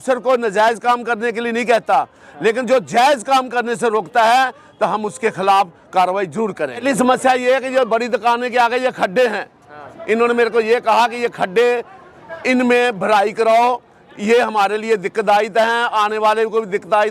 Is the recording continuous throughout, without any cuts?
no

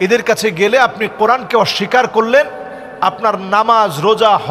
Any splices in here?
no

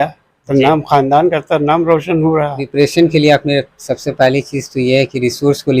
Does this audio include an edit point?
yes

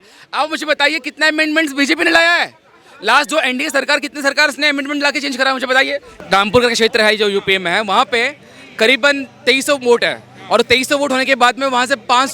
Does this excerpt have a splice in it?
yes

